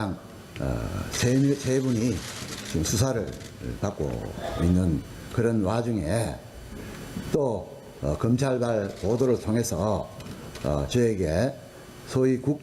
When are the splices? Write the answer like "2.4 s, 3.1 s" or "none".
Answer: 6.4 s